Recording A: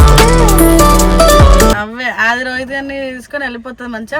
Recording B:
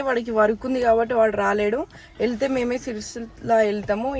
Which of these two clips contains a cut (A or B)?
A